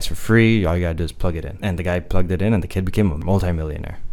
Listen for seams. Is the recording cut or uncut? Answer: cut